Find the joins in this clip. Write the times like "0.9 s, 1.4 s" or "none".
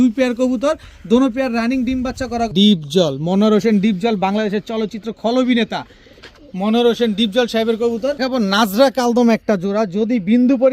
2.5 s, 8.2 s